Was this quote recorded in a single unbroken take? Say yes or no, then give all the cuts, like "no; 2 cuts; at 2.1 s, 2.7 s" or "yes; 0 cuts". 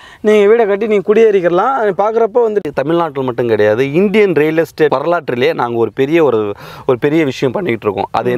no; 2 cuts; at 2.6 s, 4.9 s